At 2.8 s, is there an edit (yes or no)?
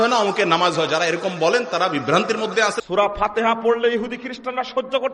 yes